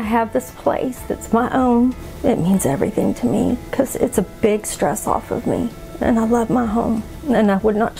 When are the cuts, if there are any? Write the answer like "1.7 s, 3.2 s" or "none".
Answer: 2.1 s, 5.8 s